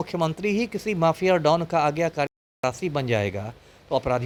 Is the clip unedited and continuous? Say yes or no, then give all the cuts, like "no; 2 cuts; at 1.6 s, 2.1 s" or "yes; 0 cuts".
yes; 0 cuts